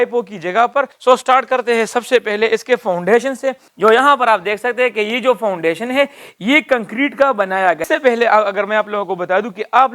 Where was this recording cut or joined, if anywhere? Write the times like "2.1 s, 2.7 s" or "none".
0.9 s, 7.8 s

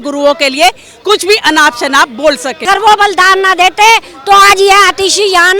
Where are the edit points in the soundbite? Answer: 2.6 s

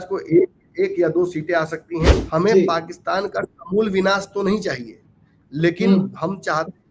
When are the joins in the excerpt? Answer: 2.2 s

